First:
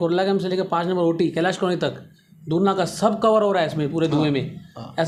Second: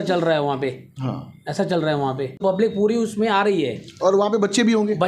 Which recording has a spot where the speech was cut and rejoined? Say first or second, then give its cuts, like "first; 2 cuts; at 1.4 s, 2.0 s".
second; 1 cut; at 2.4 s